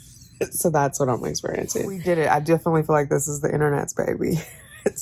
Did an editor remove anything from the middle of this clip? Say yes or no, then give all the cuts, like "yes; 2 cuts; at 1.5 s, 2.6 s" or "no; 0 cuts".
yes; 1 cut; at 2.0 s